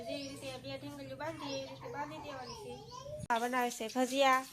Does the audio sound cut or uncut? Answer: cut